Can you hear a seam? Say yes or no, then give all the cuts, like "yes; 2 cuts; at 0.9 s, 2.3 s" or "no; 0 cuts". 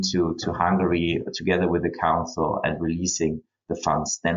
no; 0 cuts